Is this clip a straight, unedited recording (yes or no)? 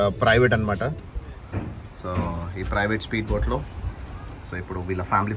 no